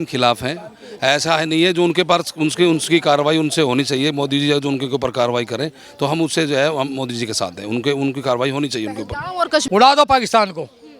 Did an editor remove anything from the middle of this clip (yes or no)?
yes